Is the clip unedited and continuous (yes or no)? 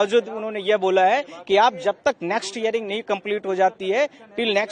yes